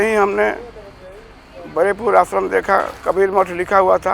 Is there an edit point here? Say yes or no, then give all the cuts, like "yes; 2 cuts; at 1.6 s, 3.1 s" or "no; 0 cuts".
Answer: no; 0 cuts